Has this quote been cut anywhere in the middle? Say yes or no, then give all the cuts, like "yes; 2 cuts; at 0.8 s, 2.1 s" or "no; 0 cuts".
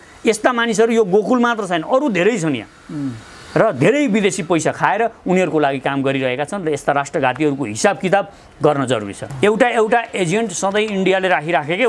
yes; 1 cut; at 9.2 s